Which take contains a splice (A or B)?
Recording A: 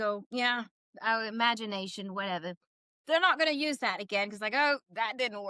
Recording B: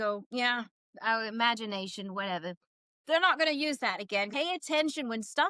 B